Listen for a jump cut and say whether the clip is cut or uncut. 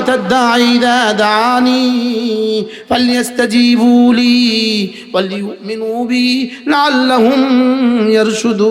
uncut